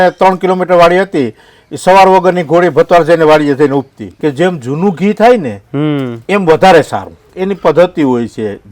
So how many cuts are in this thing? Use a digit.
2